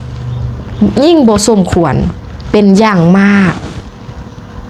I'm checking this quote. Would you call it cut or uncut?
uncut